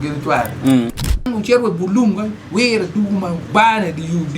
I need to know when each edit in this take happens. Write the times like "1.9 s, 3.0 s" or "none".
1.3 s

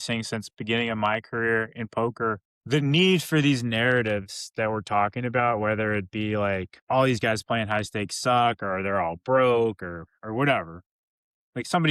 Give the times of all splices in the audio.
2.5 s, 6.7 s

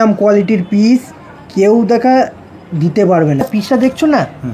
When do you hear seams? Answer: 3.4 s

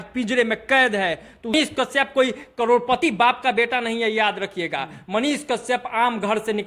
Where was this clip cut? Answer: 1.5 s

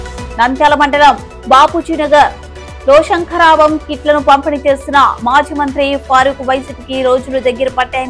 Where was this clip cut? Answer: none

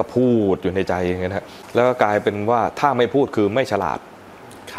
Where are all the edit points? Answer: 1.6 s

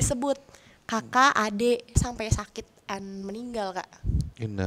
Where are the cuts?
2.0 s

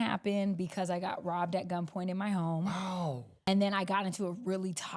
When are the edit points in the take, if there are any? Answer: 3.5 s

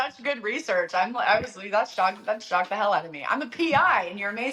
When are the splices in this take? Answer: none

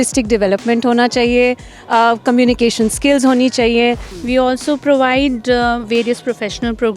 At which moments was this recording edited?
4.1 s

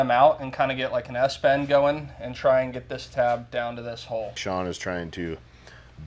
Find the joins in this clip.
4.4 s

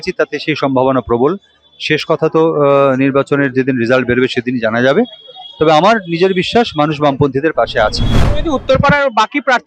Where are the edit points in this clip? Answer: 8.1 s

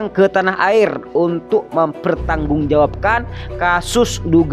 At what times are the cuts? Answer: none

